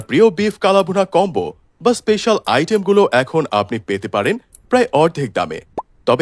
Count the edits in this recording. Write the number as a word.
one